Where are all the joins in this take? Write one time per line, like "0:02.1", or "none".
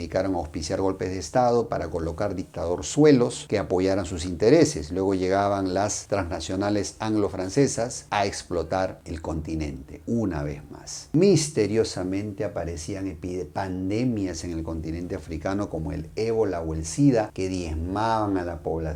none